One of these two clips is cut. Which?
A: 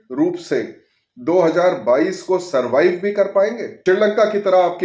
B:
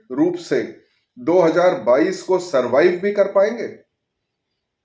A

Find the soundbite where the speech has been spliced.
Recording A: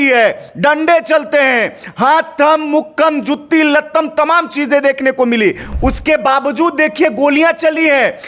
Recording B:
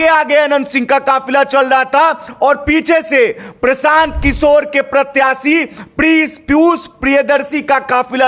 A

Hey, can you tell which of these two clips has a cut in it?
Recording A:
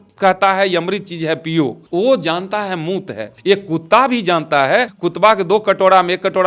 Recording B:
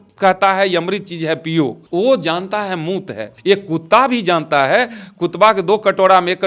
A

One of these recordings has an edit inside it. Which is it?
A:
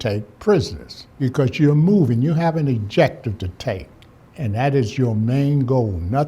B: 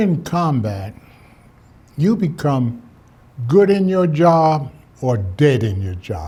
A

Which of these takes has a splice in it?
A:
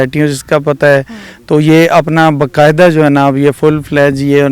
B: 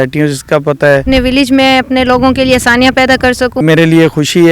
B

